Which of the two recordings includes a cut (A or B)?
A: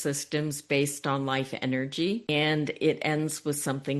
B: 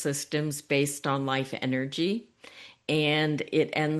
A